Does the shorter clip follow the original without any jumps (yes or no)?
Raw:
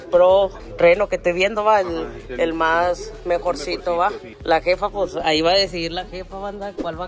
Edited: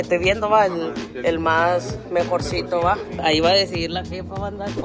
no